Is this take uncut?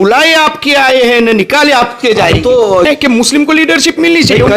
no; 1 cut; at 2.9 s

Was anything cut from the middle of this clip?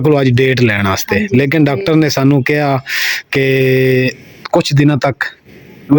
no; 0 cuts

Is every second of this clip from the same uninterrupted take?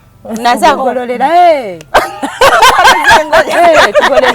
yes; 0 cuts

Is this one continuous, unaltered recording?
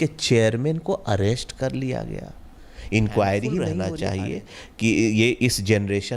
no; 1 cut; at 3.8 s

